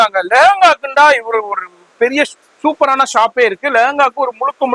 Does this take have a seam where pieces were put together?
no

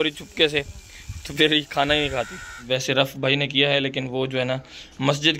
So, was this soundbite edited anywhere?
yes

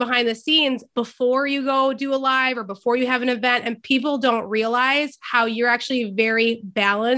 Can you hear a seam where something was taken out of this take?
no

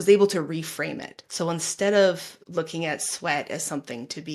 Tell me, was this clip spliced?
no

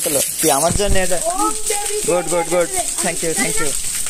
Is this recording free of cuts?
yes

